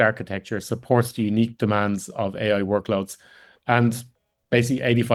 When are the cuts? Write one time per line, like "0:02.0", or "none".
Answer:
none